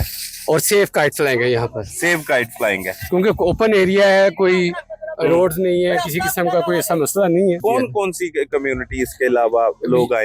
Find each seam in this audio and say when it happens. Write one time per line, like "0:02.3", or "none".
0:07.6